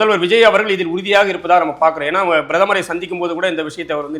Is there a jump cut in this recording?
no; 0 cuts

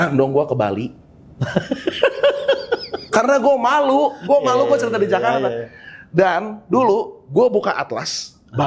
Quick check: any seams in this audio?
no; 0 cuts

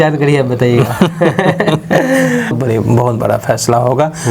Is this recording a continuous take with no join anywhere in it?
no; 1 cut; at 2.6 s

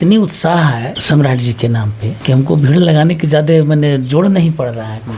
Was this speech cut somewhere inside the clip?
yes; 2 cuts; at 1.0 s, 2.1 s

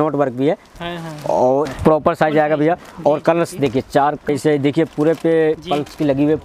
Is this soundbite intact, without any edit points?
no; 2 cuts; at 1.7 s, 4.3 s

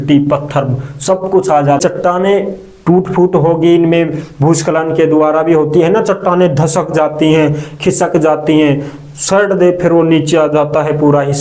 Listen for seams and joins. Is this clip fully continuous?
no; 1 cut; at 1.8 s

